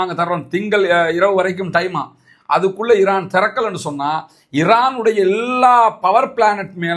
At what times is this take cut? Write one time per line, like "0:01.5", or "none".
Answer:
none